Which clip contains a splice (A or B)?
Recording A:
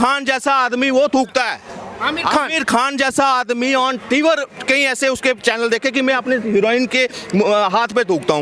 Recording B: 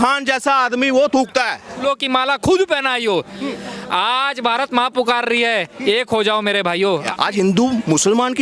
B